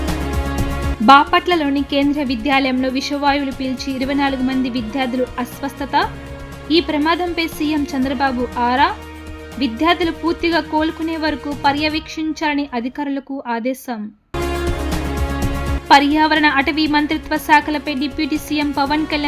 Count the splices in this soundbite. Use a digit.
1